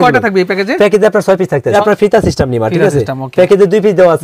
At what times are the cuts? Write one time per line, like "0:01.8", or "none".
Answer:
0:01.7